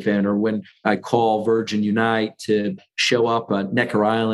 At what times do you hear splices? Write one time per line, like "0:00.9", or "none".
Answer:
none

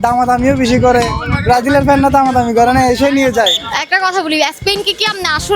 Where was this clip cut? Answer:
0:03.7

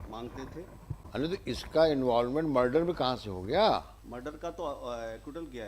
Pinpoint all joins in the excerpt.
0:01.0
0:04.0

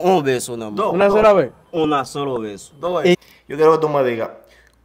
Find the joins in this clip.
0:03.2

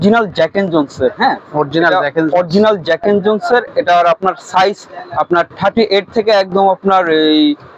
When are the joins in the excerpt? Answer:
none

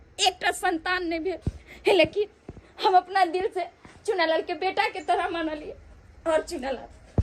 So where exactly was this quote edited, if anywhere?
none

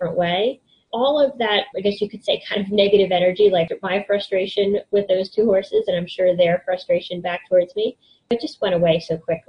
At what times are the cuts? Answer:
0:00.8
0:01.7
0:03.7
0:08.3

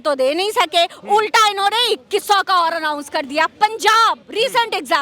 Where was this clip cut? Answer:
none

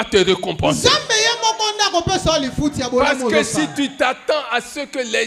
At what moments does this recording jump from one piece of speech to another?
none

